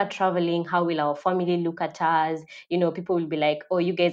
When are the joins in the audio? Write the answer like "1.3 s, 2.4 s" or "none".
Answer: none

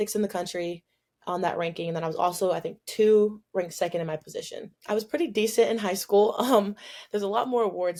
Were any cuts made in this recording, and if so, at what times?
none

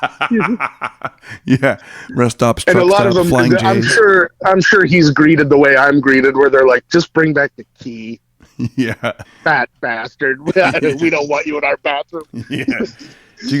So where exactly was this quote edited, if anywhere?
9.3 s

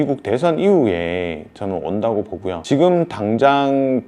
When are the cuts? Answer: 2.6 s

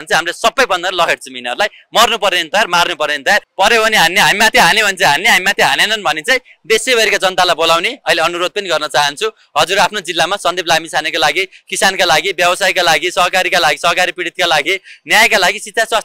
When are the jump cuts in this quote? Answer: none

